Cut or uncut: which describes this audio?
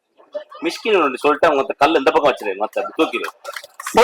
uncut